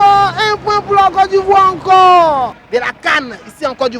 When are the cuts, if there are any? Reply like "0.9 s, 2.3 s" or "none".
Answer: 2.6 s